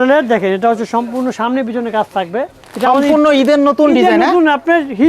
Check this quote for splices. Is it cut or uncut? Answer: cut